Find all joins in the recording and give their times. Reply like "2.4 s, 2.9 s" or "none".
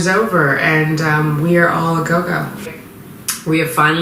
2.8 s